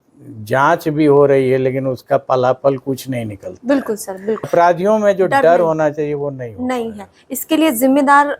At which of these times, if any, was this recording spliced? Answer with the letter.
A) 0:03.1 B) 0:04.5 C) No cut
B